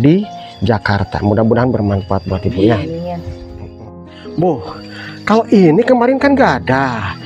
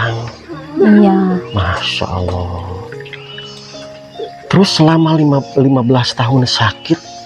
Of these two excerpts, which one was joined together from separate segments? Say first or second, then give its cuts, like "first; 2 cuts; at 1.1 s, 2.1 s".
first; 1 cut; at 3.7 s